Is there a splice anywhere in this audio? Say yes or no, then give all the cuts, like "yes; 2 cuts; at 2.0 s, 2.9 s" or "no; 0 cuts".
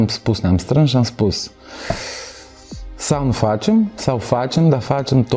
no; 0 cuts